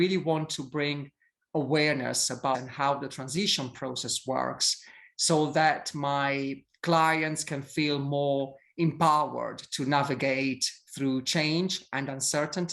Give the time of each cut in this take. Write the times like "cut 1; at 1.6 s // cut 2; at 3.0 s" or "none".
cut 1; at 2.6 s